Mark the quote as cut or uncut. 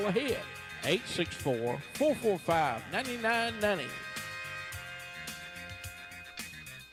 uncut